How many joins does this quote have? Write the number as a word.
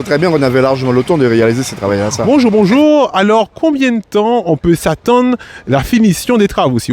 one